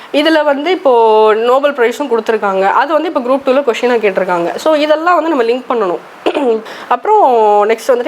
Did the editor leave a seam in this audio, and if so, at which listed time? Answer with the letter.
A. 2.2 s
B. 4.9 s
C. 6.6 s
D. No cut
C